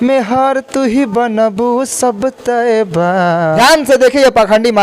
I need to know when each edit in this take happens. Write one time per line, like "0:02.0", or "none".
0:03.4

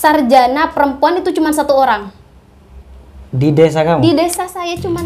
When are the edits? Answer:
none

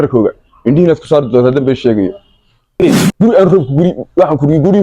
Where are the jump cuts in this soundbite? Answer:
0:02.7

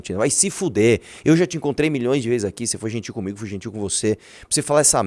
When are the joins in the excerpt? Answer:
none

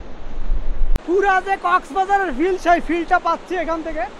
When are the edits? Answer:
0:01.0

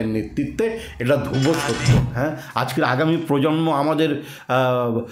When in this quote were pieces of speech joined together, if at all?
0:01.9

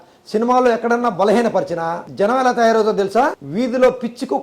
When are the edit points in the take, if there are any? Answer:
0:02.0
0:03.4

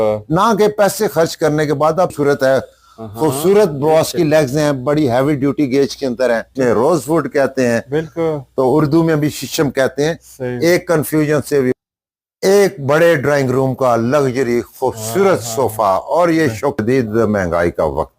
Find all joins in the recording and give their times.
0:02.1
0:06.5
0:11.7
0:16.8

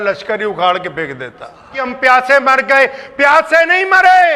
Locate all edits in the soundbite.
0:01.8

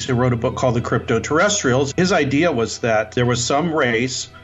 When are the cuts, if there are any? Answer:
0:01.9
0:03.1

